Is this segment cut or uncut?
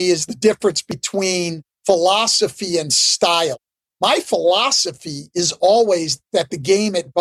cut